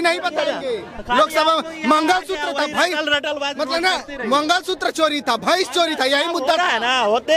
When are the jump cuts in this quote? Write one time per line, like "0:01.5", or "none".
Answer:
none